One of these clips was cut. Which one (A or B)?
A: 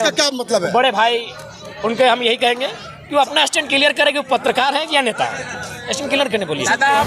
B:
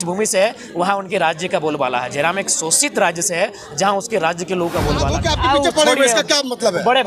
B